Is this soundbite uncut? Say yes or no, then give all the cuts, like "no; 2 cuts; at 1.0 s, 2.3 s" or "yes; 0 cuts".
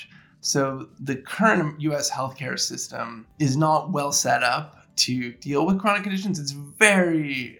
no; 2 cuts; at 0.9 s, 3.2 s